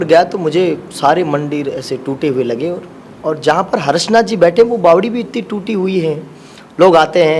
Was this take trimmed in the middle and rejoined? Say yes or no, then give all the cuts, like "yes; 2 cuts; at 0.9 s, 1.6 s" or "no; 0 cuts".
no; 0 cuts